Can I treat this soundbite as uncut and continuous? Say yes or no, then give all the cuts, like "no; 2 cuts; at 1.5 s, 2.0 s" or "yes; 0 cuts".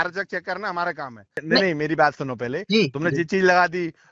no; 1 cut; at 1.3 s